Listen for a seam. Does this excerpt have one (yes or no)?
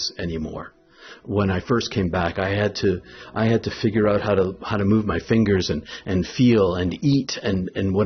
no